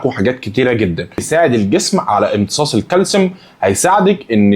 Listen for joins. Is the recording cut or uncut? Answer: cut